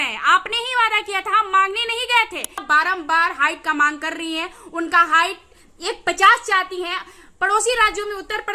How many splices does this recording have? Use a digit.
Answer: 1